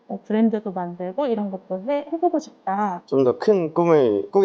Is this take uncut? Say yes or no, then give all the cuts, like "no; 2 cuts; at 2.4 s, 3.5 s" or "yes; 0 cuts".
no; 1 cut; at 2.9 s